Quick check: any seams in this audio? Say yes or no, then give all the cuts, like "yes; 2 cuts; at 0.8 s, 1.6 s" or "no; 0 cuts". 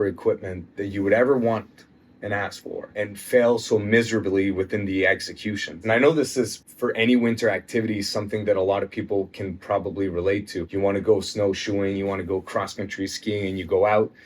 yes; 4 cuts; at 2.8 s, 5.8 s, 6.6 s, 10.6 s